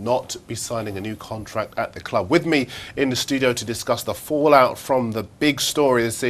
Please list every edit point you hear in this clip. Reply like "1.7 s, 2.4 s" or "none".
2.9 s